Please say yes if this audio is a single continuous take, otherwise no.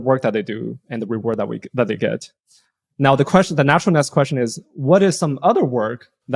yes